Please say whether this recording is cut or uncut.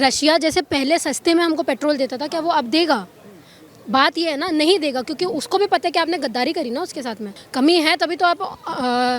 cut